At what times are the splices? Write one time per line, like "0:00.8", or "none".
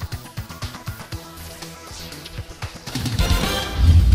none